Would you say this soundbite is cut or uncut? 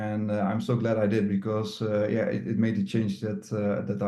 uncut